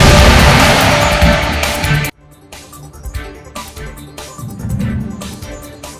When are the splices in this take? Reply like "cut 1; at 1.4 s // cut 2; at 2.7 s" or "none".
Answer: none

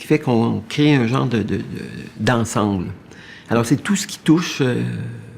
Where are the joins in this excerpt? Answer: cut 1; at 3.4 s

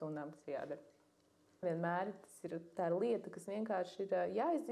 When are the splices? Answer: cut 1; at 1.6 s

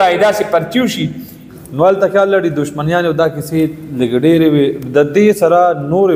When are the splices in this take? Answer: cut 1; at 1.5 s

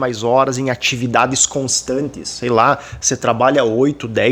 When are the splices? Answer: none

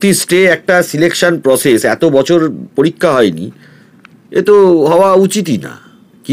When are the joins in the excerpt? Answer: none

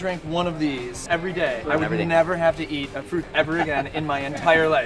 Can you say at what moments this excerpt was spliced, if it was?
cut 1; at 1.3 s // cut 2; at 3.1 s

